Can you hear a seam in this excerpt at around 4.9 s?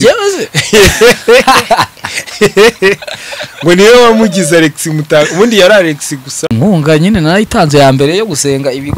no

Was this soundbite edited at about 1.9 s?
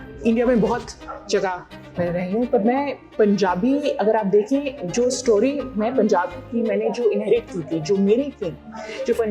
yes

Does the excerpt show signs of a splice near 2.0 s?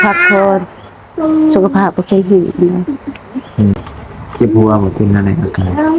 no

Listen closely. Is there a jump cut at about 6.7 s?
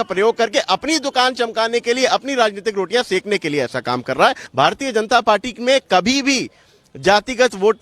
no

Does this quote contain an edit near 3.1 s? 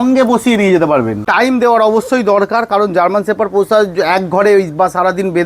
no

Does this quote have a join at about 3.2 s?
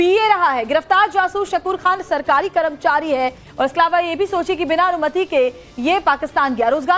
yes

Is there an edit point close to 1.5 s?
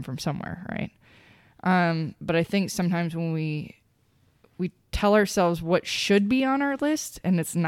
no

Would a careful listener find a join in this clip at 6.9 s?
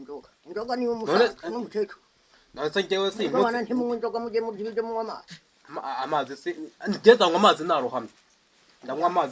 no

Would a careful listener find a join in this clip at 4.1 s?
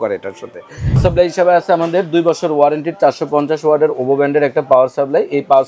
no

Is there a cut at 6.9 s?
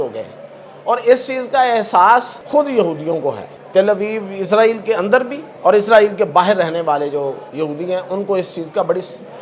no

